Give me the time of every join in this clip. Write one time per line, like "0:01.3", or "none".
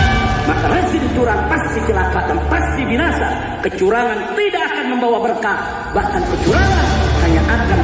none